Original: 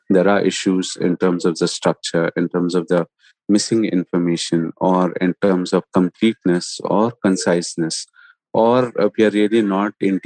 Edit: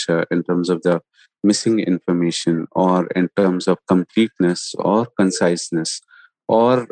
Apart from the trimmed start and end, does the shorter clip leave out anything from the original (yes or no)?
no